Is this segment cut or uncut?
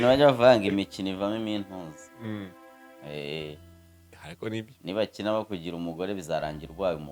uncut